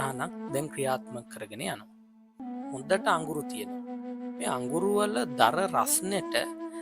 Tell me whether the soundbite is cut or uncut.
cut